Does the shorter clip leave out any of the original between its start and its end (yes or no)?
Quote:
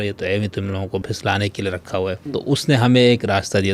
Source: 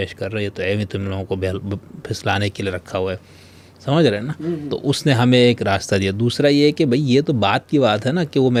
yes